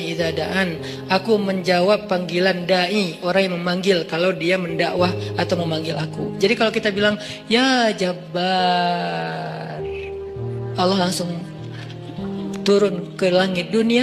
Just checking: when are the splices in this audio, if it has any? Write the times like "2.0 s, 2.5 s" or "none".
none